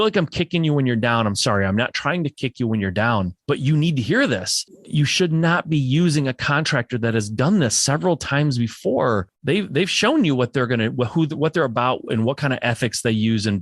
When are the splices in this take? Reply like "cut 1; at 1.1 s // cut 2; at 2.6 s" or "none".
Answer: cut 1; at 3.4 s // cut 2; at 4.8 s // cut 3; at 9.3 s